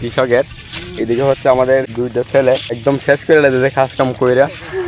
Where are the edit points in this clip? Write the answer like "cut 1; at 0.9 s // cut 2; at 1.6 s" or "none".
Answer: cut 1; at 1.9 s // cut 2; at 2.8 s